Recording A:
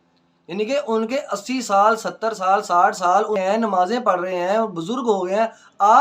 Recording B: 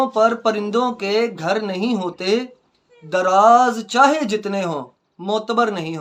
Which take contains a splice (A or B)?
A